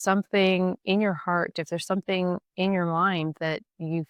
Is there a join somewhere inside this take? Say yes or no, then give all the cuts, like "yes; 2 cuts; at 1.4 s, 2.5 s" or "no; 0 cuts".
no; 0 cuts